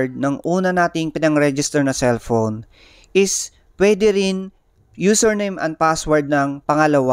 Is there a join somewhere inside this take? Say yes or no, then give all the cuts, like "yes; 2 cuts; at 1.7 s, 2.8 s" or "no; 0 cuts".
no; 0 cuts